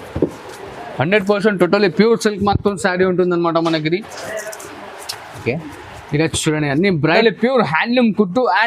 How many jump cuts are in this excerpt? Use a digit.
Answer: 1